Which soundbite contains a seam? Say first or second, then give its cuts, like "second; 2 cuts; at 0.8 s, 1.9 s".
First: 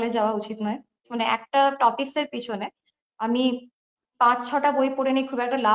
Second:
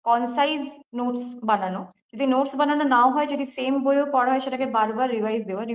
first; 1 cut; at 1.1 s